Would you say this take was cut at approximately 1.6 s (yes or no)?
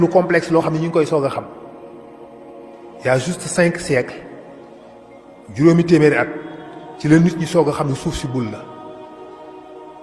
yes